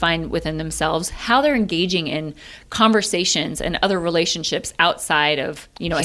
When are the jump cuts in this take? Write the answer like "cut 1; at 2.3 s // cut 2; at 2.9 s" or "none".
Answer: none